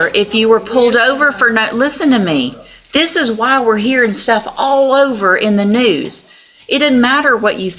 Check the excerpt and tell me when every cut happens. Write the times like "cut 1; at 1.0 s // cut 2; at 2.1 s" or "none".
none